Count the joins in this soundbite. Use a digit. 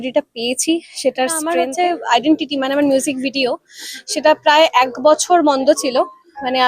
1